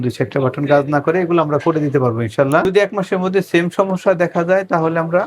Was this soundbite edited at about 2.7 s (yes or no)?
yes